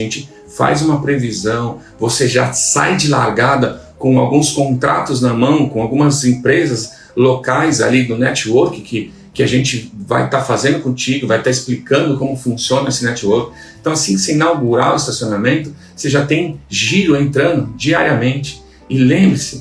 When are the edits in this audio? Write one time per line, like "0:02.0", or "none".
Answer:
none